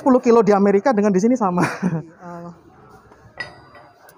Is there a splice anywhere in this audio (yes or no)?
yes